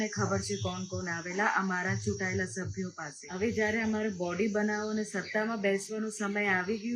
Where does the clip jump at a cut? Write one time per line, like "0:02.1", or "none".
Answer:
0:03.2